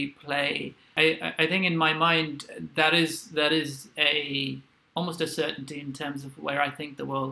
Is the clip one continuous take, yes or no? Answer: no